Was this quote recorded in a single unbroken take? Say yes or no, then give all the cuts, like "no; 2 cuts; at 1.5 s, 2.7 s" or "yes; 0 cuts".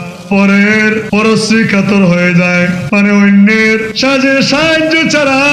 no; 3 cuts; at 1.0 s, 2.8 s, 3.9 s